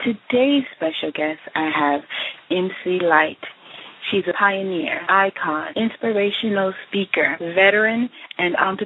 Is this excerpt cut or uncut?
cut